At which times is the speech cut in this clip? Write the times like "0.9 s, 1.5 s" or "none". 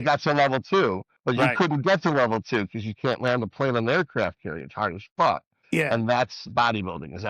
1.1 s, 5.8 s

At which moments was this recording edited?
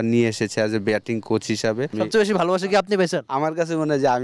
1.9 s

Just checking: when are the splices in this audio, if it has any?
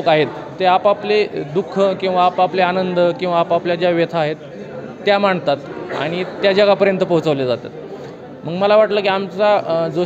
none

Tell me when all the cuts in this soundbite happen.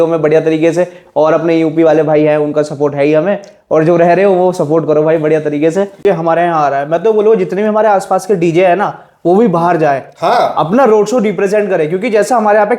6.0 s

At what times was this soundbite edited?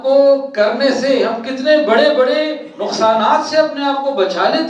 none

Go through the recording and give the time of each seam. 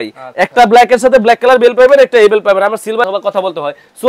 3.1 s

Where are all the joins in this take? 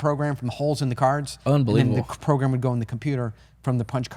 none

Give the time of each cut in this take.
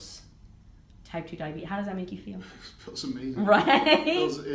none

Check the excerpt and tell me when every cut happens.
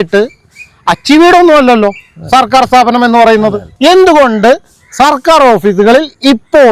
3.6 s

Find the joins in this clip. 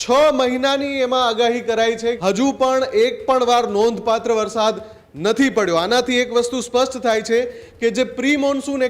2.2 s

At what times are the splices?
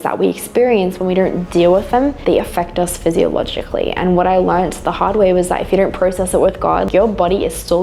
6.9 s

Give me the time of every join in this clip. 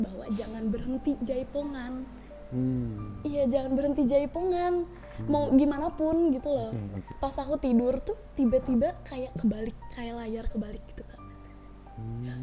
7.0 s

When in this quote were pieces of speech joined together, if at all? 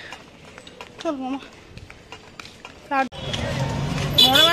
3.1 s

